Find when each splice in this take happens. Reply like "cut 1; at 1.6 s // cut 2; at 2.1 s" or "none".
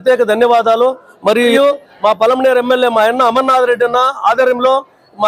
cut 1; at 1.5 s